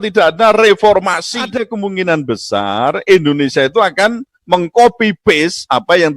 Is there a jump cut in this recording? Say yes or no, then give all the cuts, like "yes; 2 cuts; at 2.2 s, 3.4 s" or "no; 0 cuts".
yes; 1 cut; at 1.5 s